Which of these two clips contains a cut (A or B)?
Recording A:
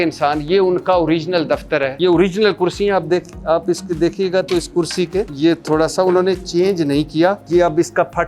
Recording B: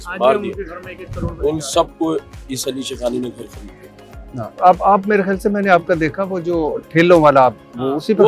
A